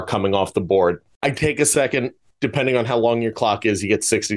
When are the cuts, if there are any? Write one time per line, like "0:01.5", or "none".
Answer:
0:01.1
0:02.2